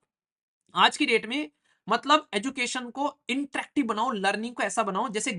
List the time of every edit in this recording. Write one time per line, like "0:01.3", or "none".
none